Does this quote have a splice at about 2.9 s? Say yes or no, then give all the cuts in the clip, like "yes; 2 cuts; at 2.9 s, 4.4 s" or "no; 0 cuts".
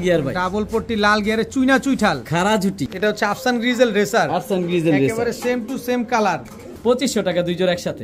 yes; 2 cuts; at 2.9 s, 6.7 s